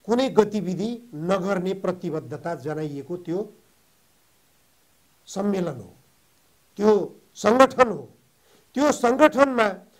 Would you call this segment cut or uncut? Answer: uncut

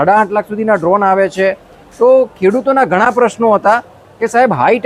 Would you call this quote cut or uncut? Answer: uncut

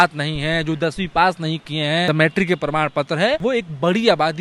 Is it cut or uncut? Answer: cut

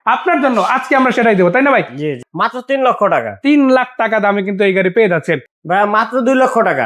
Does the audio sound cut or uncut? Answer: cut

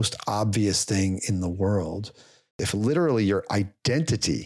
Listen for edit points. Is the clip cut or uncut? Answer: cut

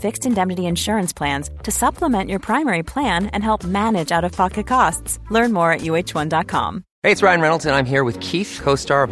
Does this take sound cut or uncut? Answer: cut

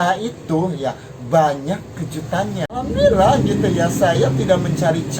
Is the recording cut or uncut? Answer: cut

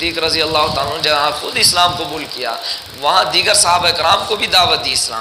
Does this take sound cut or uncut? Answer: uncut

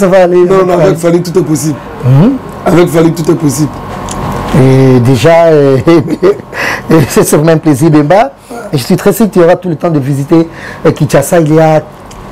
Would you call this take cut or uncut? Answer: uncut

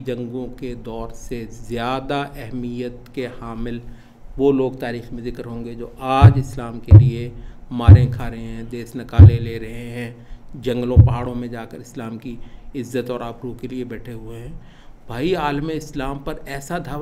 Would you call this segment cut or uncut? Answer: uncut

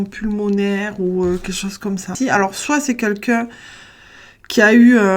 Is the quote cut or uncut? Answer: cut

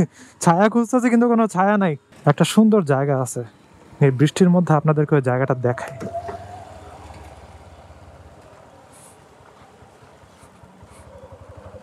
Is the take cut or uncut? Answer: cut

